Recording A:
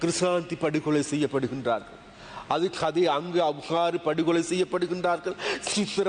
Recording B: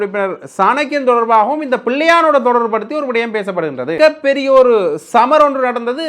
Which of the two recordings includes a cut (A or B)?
B